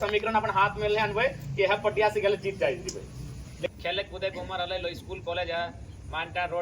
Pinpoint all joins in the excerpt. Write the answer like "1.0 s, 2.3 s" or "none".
3.7 s